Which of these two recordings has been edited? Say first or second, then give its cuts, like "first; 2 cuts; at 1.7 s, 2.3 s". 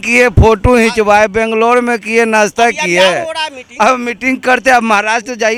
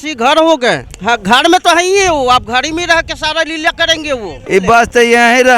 second; 2 cuts; at 0.9 s, 4.4 s